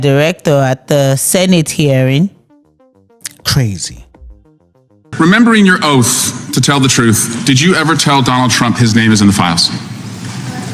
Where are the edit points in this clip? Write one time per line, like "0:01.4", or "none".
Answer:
0:05.1

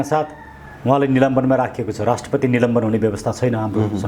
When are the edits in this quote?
none

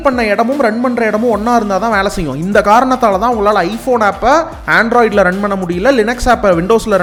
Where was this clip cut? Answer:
none

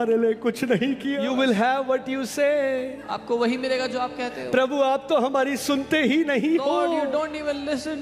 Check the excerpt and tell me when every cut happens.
0:01.2

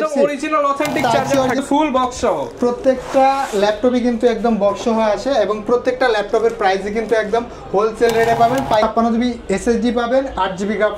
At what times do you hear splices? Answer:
0:01.6
0:08.9

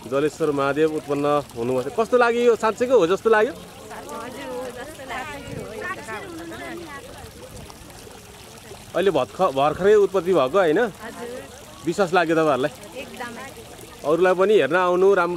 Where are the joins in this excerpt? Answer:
none

